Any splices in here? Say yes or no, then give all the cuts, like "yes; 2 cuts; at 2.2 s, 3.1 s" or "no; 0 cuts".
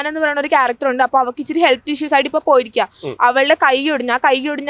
no; 0 cuts